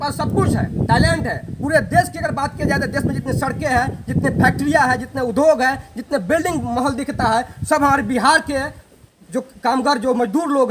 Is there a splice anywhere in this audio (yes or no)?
no